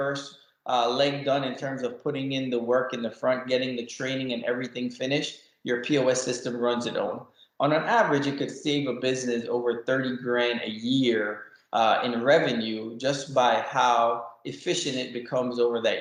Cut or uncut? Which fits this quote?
uncut